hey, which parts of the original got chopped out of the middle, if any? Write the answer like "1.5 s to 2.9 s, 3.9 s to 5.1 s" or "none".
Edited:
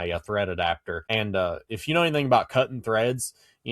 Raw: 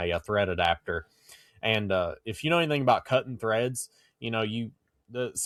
0.9 s to 1.5 s